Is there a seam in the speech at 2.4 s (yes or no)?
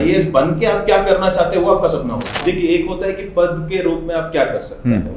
yes